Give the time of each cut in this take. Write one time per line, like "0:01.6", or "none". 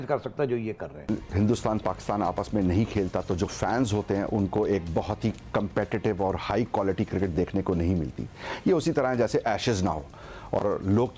0:01.1

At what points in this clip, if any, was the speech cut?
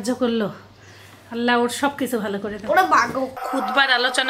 0:03.4

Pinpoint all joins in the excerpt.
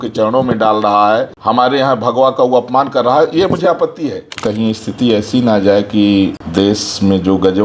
0:01.3
0:04.4
0:06.4

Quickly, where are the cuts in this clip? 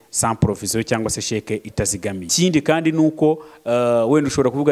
0:02.3

